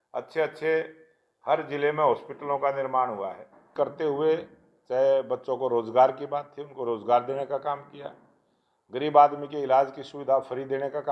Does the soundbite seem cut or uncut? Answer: cut